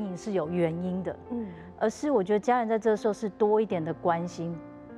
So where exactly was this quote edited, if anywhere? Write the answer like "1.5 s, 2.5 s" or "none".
1.6 s